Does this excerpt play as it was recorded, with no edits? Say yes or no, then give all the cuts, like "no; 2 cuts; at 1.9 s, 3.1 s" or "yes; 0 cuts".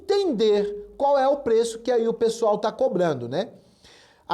yes; 0 cuts